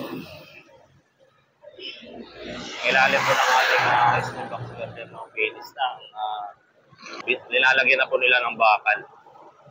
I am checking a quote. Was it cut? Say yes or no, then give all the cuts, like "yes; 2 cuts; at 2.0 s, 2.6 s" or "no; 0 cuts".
yes; 1 cut; at 7.1 s